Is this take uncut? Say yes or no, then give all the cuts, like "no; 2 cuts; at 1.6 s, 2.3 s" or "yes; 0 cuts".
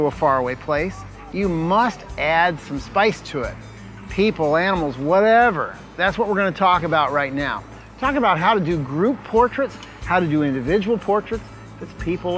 no; 1 cut; at 5.3 s